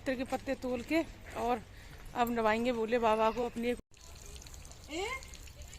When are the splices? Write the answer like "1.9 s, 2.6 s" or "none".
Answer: 3.6 s